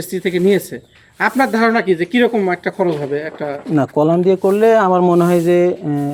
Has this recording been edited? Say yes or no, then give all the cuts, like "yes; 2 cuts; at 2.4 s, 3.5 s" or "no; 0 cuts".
no; 0 cuts